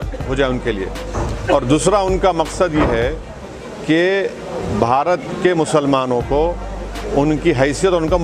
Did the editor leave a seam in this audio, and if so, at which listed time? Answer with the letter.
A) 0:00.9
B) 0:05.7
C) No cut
C